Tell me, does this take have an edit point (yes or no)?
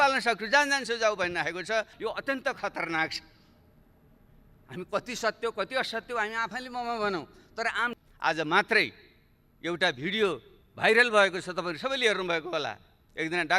yes